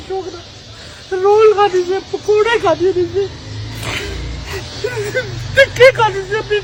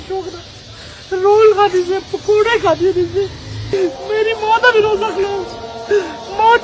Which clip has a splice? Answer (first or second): second